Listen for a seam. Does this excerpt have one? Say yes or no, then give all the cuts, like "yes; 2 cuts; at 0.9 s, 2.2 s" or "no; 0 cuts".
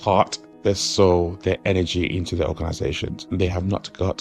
yes; 1 cut; at 3.2 s